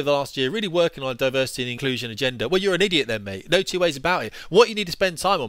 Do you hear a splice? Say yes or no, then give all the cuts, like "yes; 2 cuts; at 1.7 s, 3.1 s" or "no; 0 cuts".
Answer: yes; 1 cut; at 1.7 s